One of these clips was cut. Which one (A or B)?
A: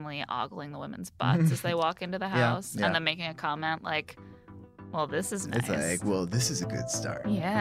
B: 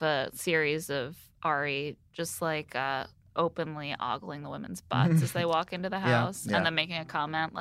B